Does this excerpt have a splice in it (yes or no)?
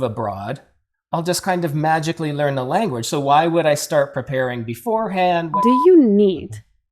yes